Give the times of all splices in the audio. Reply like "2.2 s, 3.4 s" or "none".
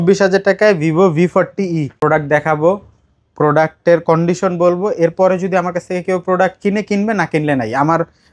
1.9 s

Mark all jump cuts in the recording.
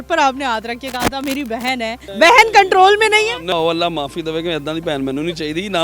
2.0 s, 3.5 s

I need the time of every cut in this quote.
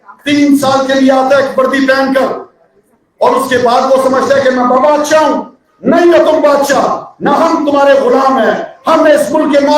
none

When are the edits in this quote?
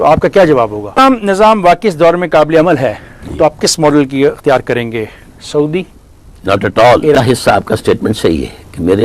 1.0 s, 7.2 s

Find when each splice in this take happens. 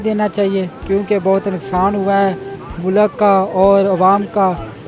none

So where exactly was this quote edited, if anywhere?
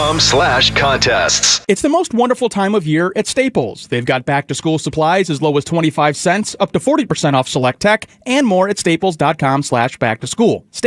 1.5 s

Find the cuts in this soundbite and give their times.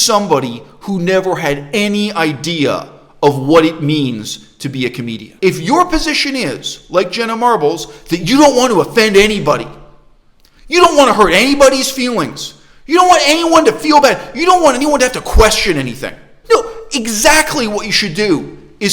5.3 s, 16.3 s

